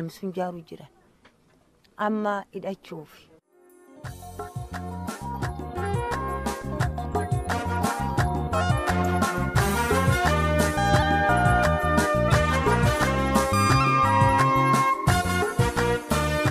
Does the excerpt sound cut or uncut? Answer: uncut